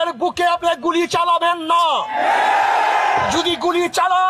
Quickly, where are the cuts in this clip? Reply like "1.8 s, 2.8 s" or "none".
none